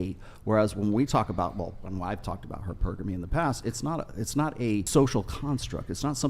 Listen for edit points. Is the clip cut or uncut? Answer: cut